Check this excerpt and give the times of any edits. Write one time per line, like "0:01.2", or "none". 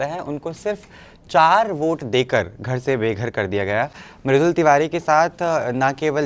none